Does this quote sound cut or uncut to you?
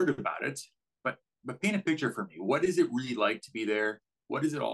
uncut